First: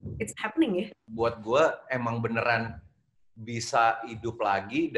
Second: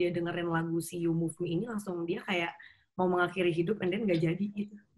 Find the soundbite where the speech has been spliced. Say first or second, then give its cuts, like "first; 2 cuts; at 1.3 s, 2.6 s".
first; 1 cut; at 1.0 s